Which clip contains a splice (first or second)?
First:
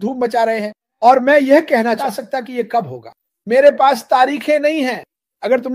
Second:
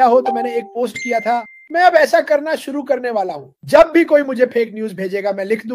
first